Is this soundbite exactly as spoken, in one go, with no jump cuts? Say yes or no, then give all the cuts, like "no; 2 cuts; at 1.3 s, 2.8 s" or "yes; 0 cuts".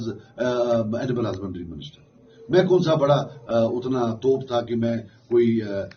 yes; 0 cuts